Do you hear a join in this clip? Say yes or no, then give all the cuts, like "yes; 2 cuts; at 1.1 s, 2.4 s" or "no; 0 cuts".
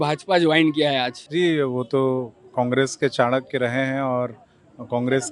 yes; 1 cut; at 1.2 s